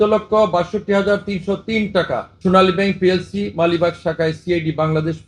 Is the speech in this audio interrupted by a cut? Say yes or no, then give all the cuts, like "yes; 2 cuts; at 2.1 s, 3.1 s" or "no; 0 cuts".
yes; 1 cut; at 2.3 s